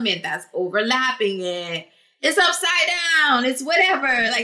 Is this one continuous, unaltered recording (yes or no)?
yes